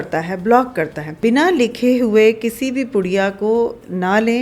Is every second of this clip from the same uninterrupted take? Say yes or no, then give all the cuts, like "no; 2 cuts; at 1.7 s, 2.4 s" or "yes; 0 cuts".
no; 1 cut; at 1.2 s